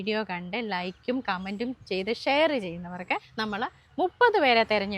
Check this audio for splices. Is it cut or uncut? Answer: cut